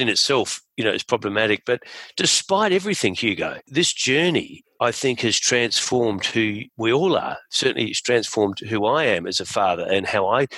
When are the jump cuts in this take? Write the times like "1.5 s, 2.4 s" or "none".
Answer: 6.7 s